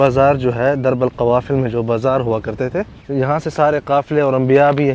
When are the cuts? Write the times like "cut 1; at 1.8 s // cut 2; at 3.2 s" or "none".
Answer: cut 1; at 3.0 s